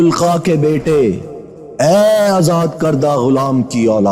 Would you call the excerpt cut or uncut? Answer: uncut